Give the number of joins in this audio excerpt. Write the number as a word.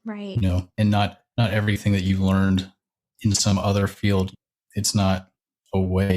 one